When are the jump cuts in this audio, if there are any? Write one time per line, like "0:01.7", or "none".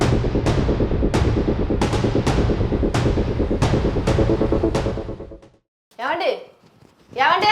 none

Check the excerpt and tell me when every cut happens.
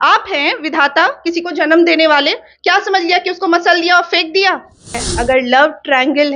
0:05.0

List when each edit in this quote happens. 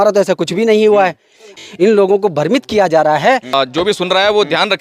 0:01.5
0:03.5

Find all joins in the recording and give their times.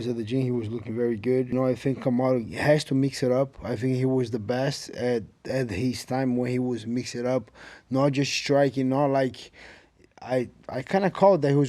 0:01.5

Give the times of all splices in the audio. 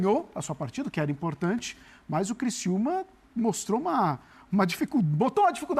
none

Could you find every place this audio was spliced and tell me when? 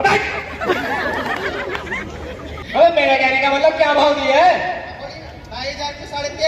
0:02.6

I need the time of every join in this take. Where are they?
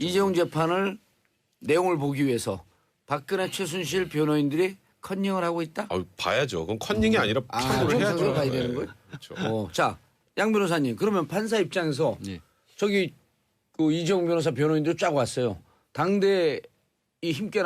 0:02.3

